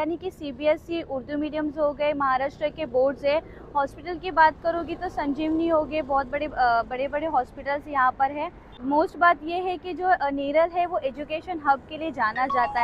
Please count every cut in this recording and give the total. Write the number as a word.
zero